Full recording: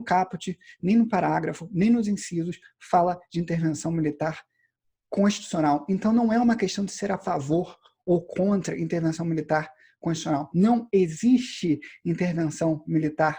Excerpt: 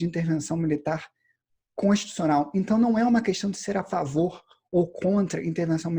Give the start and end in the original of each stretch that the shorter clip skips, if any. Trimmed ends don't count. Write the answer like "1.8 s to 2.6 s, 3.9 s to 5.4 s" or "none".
none